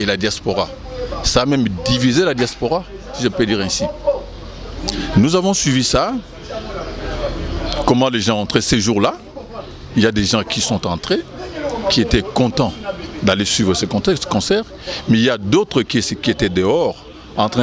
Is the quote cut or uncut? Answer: uncut